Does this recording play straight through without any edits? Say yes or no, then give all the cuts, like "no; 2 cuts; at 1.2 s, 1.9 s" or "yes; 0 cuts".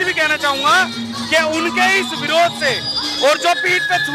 yes; 0 cuts